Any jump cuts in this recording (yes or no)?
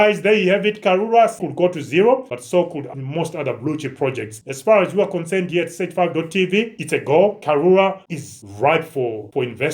yes